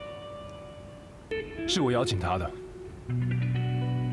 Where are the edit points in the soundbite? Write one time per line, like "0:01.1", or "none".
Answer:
0:01.3